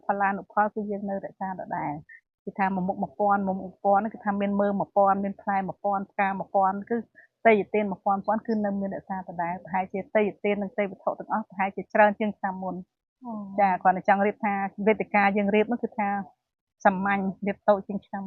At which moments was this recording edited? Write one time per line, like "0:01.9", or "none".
none